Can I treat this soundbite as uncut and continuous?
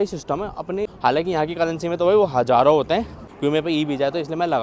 no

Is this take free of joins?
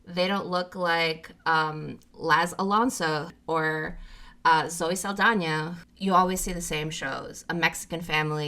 no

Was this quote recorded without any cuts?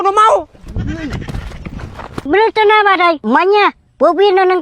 no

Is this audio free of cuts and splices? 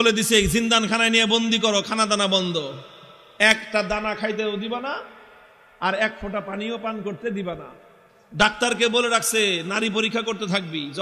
yes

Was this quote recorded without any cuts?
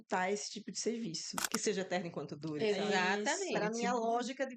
no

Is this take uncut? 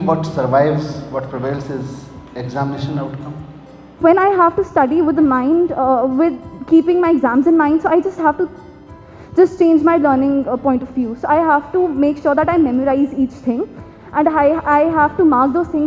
yes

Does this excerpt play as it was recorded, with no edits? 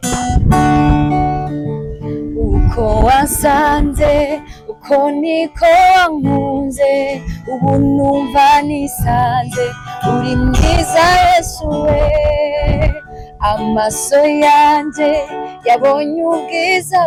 yes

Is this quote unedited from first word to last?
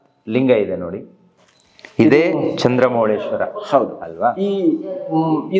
yes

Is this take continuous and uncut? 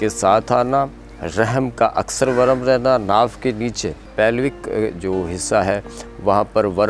no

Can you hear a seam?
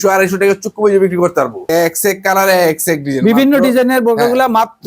no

